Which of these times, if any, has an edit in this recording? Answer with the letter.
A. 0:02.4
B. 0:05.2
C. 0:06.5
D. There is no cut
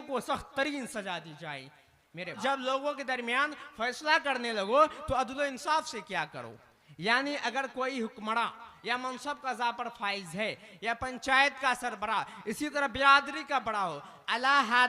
A